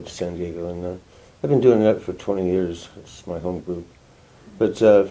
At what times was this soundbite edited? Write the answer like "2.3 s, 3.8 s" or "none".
none

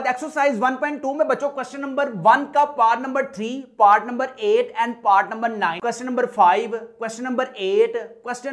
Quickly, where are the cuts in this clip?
5.8 s

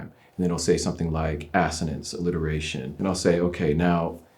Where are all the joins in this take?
2.9 s

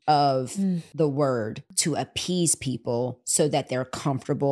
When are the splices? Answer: 0.9 s, 1.7 s

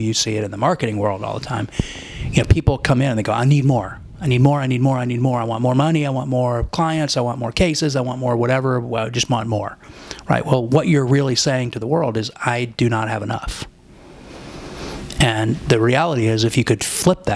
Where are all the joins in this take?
none

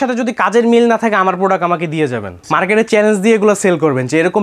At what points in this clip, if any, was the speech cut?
2.3 s

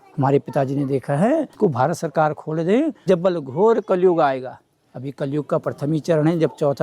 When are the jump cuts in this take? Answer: 1.5 s, 3.0 s

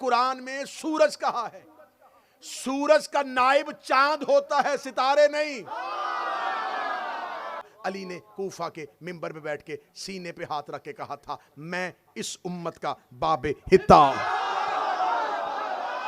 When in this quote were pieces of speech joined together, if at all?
7.7 s

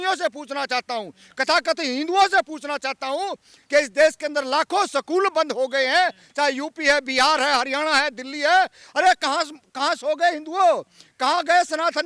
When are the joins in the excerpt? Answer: none

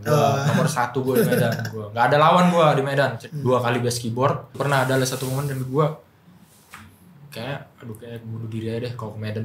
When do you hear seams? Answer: 3.2 s, 4.5 s

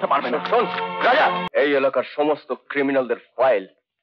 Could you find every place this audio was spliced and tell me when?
1.5 s

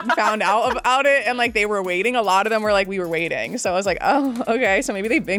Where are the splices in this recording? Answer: none

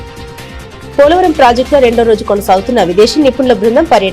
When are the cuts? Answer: 0.9 s

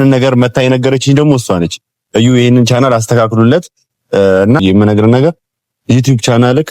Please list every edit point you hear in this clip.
4.6 s

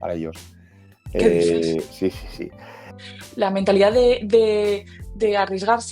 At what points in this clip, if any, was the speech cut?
3.0 s

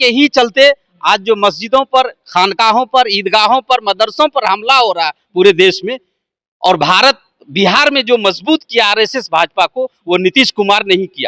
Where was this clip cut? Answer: none

